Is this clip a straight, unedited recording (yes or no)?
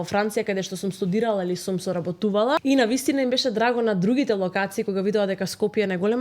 no